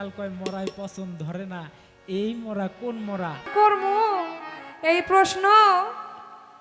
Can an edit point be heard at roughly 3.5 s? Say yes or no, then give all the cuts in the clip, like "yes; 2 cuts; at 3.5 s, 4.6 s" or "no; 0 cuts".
yes; 1 cut; at 3.5 s